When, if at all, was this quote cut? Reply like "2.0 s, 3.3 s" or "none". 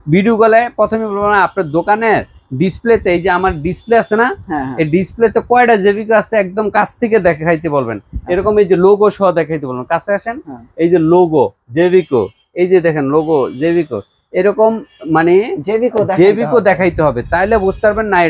none